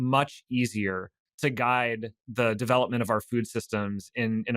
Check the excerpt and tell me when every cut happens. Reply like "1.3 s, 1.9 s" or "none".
1.2 s, 2.2 s